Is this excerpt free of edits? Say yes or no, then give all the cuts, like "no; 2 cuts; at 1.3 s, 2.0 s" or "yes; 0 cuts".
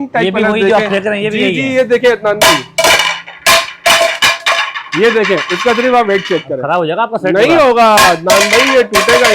yes; 0 cuts